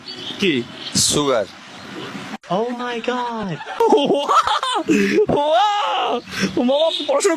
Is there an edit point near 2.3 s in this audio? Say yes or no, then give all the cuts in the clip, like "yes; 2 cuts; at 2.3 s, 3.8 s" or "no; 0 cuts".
yes; 1 cut; at 2.3 s